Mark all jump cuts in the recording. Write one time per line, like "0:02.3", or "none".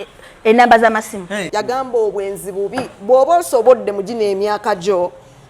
0:01.5